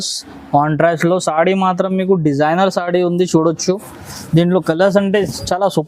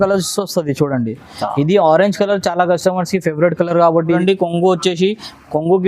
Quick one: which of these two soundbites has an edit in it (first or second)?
second